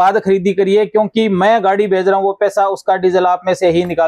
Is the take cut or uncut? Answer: uncut